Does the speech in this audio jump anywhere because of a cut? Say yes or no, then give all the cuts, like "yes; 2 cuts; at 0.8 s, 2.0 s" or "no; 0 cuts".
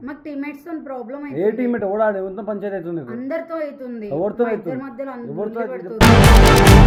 no; 0 cuts